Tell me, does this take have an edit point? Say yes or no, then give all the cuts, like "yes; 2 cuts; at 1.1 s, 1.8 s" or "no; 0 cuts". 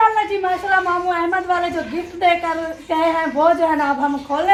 no; 0 cuts